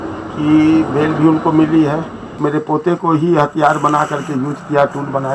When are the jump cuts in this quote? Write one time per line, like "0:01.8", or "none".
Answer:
0:02.3